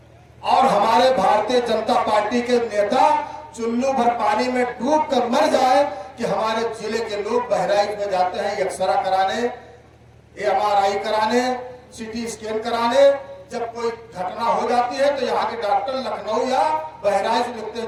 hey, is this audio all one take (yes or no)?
yes